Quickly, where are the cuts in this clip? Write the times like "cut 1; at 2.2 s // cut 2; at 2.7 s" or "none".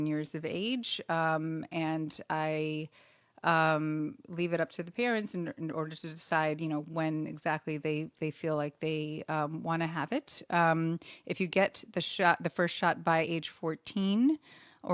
none